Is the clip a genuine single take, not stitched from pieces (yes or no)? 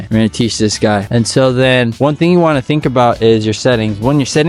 no